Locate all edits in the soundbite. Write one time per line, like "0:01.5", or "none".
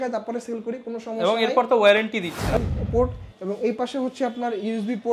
0:02.6

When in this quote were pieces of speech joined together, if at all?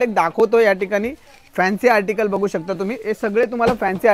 none

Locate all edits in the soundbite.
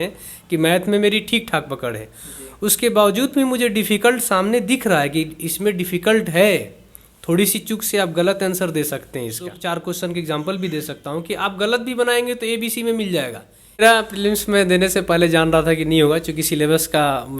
0:09.5
0:13.8

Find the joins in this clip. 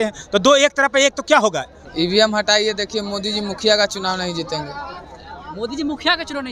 0:01.8

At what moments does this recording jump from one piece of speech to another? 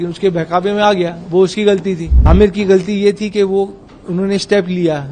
0:02.2

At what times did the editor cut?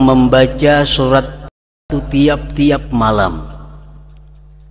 0:01.6

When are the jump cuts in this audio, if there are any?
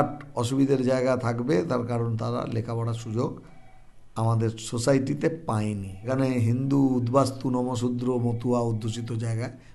0:06.1

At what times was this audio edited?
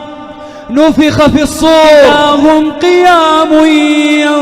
0:02.1

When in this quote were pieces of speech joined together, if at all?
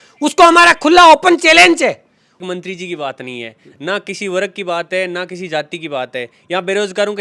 0:02.4

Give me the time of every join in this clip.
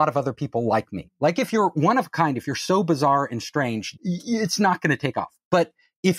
0:03.9

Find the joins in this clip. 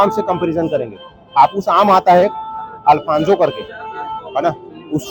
none

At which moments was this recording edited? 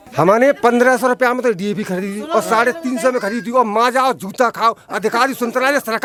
none

